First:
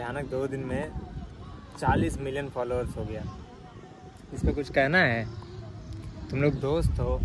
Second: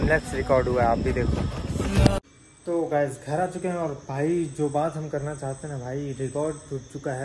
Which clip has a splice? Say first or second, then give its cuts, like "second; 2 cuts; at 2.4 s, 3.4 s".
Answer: second; 1 cut; at 2.2 s